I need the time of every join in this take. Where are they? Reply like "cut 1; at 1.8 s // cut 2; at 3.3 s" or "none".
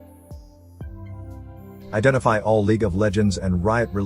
cut 1; at 1.9 s